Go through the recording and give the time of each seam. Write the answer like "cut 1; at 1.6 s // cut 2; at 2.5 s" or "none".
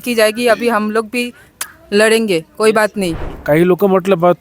cut 1; at 3.3 s